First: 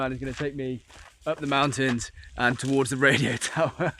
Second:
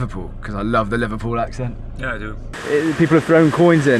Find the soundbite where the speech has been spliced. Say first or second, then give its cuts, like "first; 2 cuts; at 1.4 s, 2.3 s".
second; 1 cut; at 2.5 s